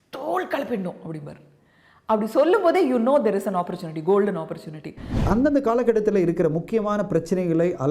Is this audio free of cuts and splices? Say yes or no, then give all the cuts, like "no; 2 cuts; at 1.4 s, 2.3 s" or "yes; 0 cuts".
no; 1 cut; at 5.2 s